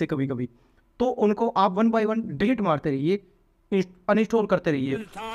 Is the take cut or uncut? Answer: uncut